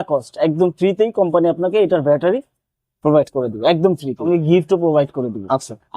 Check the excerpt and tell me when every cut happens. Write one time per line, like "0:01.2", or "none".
0:04.2